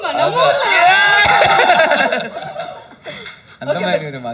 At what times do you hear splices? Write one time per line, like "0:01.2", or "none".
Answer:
none